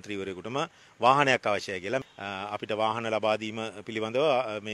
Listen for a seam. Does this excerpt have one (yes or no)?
no